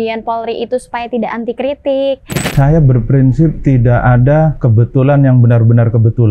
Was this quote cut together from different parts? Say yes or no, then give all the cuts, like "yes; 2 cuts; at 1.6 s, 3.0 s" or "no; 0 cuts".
yes; 3 cuts; at 2.5 s, 3.6 s, 4.6 s